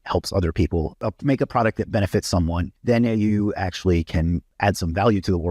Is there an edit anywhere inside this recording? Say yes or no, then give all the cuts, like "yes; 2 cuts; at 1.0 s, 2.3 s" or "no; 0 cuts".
yes; 3 cuts; at 1.0 s, 2.7 s, 4.5 s